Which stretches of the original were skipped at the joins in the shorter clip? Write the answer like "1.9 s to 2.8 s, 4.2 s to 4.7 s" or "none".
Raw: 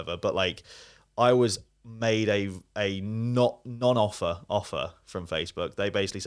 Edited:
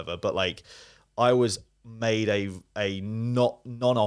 none